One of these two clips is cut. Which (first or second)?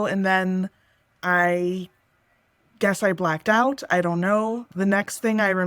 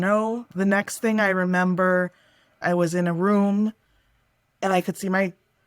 second